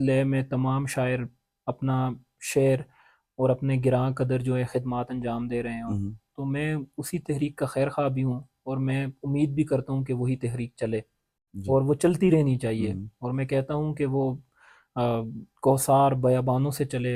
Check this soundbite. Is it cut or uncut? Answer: uncut